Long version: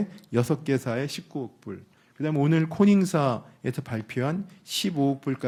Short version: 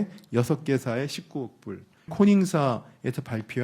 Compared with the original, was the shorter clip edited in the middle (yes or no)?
yes